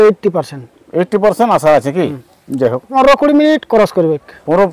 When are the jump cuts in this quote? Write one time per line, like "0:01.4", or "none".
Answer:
0:02.9